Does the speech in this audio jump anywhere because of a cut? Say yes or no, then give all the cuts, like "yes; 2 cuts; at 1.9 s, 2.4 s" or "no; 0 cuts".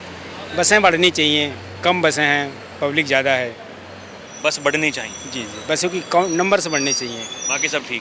no; 0 cuts